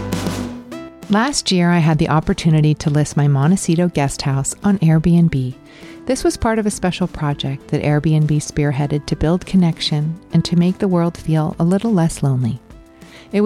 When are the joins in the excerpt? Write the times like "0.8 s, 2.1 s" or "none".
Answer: 0.9 s